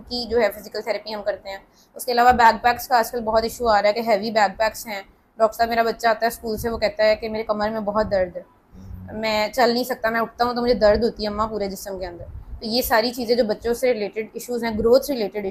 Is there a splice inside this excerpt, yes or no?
no